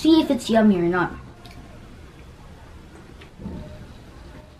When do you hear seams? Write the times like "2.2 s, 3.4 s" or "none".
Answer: 3.4 s